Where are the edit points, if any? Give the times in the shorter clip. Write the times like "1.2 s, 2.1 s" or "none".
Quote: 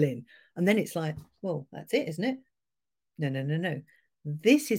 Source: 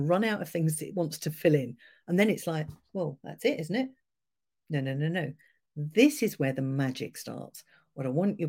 none